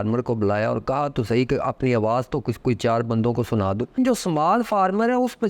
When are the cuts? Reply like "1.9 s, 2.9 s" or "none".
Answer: 4.0 s